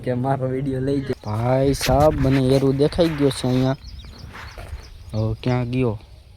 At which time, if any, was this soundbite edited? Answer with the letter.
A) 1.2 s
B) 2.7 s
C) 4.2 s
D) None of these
A